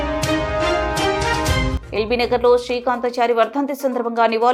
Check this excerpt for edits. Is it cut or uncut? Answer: uncut